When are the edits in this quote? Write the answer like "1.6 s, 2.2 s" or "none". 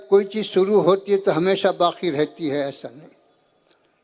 none